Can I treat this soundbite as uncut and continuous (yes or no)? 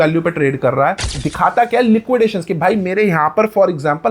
no